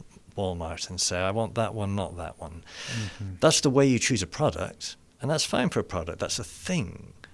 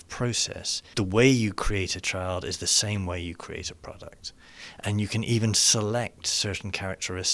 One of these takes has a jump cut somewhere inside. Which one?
second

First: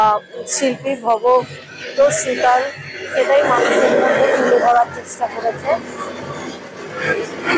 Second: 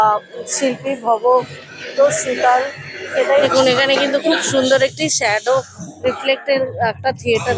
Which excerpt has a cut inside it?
second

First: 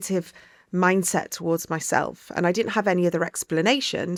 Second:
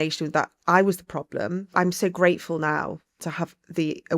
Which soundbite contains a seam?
second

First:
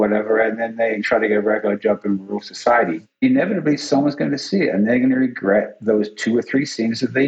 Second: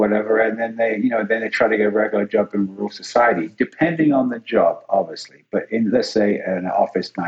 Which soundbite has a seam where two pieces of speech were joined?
first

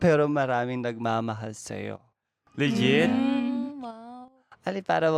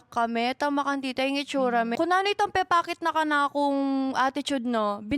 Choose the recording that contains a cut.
second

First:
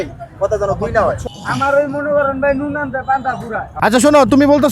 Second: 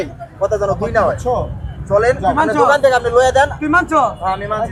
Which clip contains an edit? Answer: first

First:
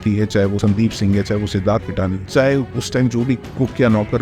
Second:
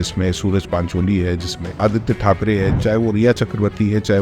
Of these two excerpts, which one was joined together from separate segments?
second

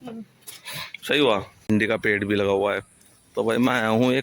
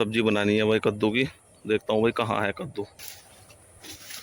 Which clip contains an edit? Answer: first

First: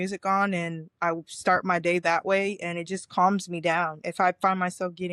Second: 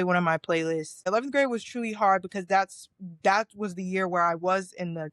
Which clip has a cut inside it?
second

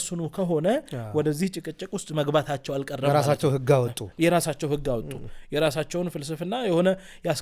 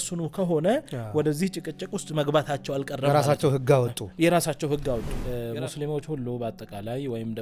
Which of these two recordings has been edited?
second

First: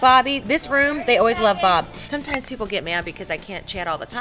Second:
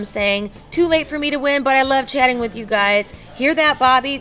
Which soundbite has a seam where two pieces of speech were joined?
first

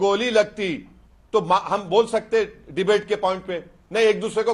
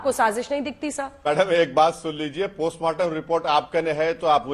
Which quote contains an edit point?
second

